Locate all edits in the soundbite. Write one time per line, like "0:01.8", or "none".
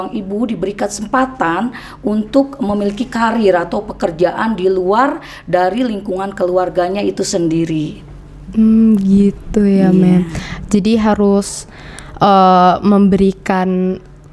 none